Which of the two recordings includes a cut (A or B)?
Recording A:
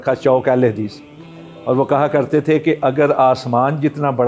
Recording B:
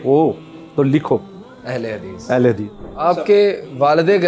B